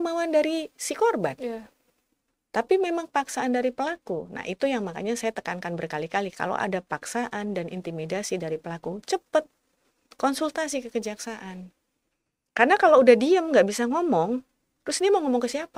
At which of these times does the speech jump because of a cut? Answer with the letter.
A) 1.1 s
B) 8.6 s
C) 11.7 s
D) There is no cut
D